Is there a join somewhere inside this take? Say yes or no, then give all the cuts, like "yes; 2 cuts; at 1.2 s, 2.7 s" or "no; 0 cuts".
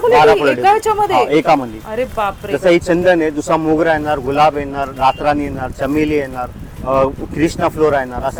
no; 0 cuts